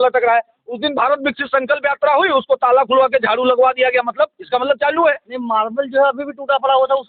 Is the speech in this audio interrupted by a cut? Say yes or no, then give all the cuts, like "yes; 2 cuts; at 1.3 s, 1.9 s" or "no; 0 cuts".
no; 0 cuts